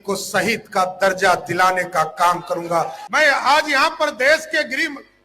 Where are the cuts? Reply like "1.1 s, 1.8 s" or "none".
3.0 s